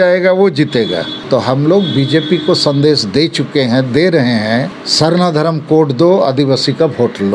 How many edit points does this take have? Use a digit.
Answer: 2